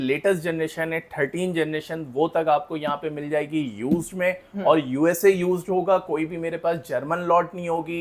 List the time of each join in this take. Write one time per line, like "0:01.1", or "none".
none